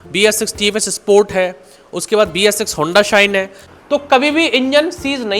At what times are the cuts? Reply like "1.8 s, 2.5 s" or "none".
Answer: 3.7 s